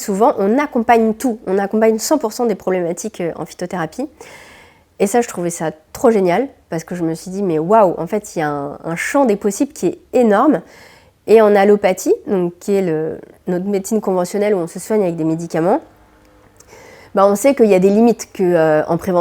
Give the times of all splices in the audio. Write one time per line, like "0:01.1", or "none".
none